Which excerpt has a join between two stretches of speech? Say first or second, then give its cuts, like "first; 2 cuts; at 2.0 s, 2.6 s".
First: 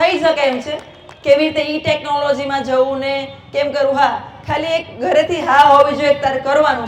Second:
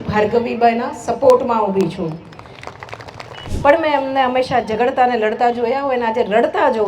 second; 1 cut; at 3.5 s